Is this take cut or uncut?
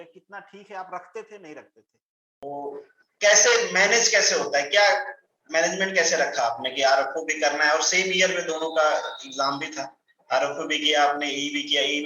cut